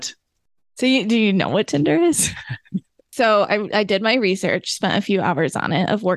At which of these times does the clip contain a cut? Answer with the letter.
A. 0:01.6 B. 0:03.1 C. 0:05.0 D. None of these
B